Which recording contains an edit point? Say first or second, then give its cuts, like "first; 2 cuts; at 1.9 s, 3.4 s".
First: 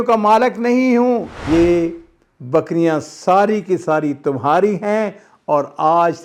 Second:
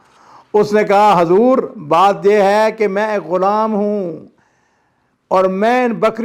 first; 1 cut; at 1.4 s